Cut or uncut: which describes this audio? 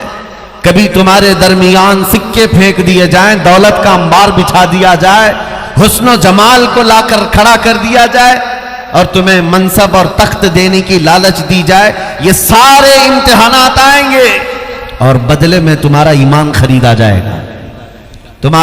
uncut